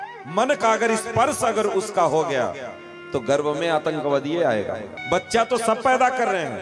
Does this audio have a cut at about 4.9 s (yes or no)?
yes